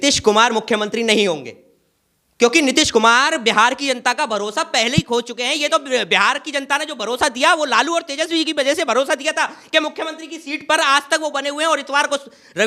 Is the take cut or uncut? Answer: uncut